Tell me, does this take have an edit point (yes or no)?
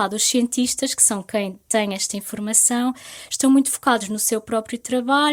no